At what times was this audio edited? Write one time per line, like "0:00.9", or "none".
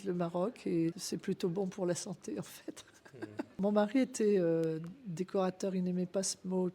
0:01.1
0:03.6